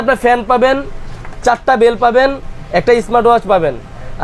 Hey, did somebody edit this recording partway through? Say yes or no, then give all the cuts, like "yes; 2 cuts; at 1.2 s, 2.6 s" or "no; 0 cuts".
no; 0 cuts